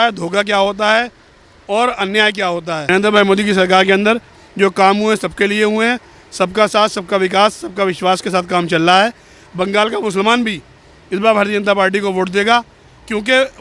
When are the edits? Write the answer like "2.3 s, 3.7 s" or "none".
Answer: 2.7 s